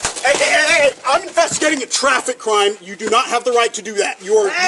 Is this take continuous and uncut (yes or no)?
yes